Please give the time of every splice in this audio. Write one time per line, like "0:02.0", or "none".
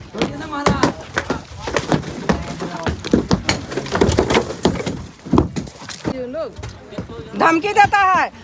0:06.1

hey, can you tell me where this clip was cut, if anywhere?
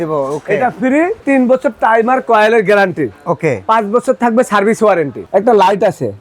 0:01.2
0:05.2

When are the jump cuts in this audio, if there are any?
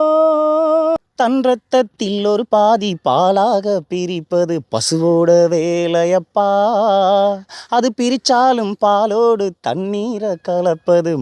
0:01.0

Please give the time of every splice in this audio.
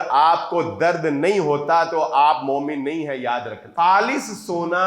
0:03.6

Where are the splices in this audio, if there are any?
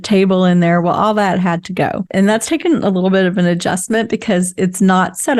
0:02.1

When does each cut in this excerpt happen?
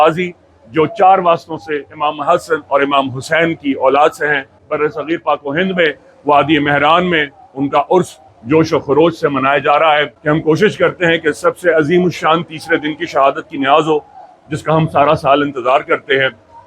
0:04.6
0:10.1

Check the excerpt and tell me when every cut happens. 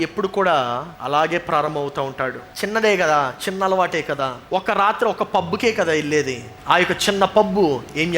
0:00.9
0:02.4
0:04.4
0:06.5

